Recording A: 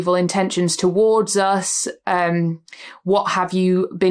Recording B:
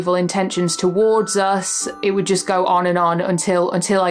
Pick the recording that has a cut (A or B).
B